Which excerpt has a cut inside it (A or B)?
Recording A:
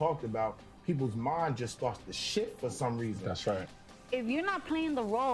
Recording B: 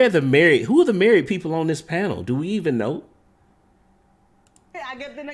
A